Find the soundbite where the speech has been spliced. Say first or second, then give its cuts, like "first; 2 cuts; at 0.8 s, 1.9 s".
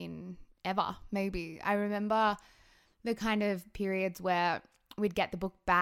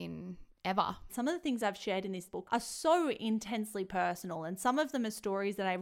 second; 2 cuts; at 1.1 s, 2.2 s